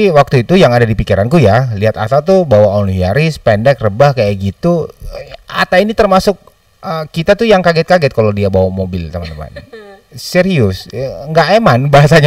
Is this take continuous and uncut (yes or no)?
yes